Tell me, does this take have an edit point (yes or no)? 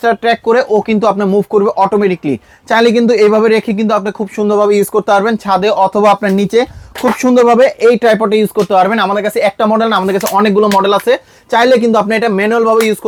no